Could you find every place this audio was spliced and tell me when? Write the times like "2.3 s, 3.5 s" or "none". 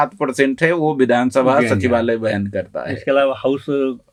none